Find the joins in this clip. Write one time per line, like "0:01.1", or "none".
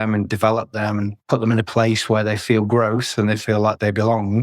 0:01.2